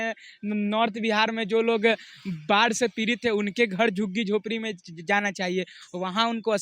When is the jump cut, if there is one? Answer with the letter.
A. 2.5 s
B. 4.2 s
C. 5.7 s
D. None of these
D